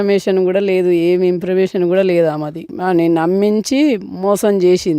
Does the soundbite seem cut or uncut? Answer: cut